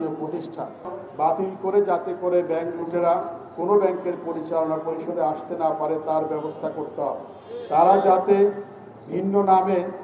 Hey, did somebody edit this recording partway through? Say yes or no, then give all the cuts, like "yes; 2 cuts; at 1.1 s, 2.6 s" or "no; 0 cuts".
yes; 1 cut; at 1.0 s